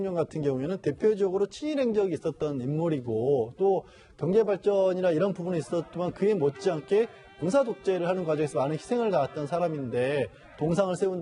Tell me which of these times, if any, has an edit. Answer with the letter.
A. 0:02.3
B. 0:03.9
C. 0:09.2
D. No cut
A